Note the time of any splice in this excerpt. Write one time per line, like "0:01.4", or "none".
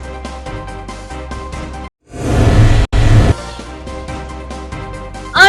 0:01.0